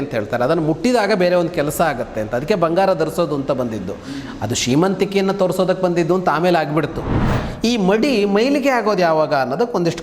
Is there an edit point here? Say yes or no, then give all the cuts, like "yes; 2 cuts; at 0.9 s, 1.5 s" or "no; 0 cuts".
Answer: yes; 1 cut; at 7.2 s